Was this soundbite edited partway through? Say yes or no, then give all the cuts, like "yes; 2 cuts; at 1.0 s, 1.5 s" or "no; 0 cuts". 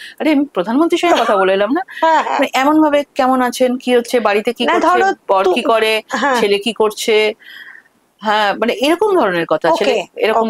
no; 0 cuts